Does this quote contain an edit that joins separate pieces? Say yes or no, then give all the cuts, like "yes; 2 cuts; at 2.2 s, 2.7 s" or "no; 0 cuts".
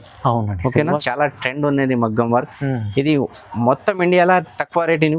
yes; 1 cut; at 1.0 s